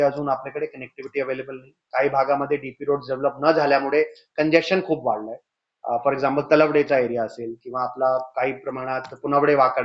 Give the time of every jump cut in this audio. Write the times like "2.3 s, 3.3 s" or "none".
none